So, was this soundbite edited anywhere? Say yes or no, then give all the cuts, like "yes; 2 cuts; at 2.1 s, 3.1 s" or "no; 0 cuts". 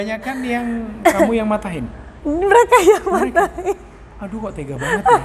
no; 0 cuts